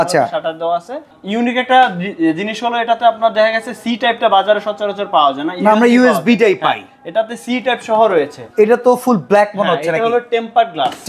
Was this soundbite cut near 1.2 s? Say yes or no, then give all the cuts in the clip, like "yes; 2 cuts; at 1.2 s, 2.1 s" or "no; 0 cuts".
yes; 2 cuts; at 1.2 s, 8.4 s